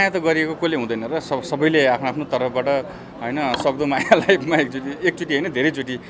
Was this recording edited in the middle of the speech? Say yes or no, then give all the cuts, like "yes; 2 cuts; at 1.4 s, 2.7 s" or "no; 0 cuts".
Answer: no; 0 cuts